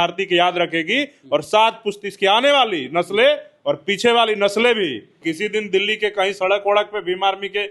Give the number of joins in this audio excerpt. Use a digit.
1